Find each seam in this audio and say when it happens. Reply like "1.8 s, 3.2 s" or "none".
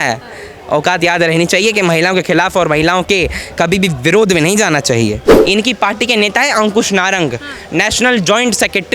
5.3 s